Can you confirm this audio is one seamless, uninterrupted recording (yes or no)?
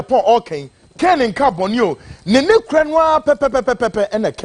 yes